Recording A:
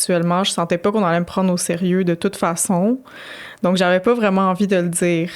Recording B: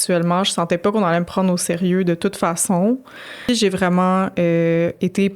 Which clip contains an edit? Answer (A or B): B